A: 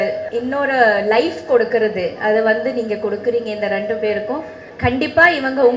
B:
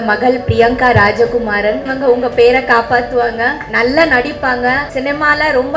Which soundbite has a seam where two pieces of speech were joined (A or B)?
B